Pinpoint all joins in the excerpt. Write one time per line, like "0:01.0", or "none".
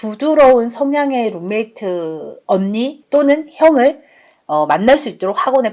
0:03.0